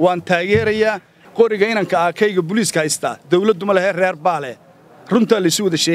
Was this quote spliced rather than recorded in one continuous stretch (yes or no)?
yes